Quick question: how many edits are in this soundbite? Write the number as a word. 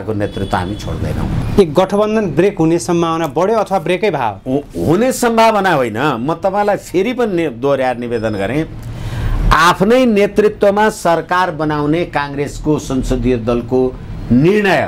one